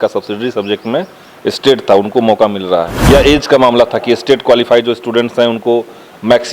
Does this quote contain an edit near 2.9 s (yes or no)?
yes